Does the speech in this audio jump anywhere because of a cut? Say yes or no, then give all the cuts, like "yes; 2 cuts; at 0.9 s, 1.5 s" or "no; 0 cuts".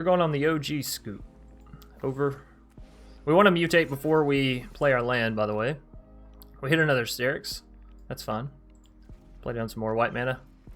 no; 0 cuts